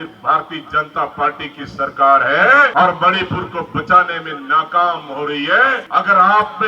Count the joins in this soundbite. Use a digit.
2